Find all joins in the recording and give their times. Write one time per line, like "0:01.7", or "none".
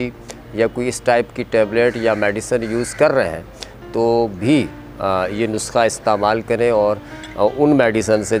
none